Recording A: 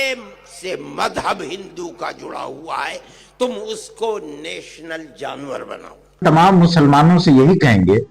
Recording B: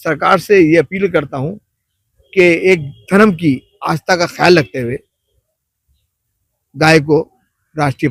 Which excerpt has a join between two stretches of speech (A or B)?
A